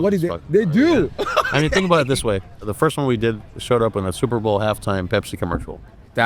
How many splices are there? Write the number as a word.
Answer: one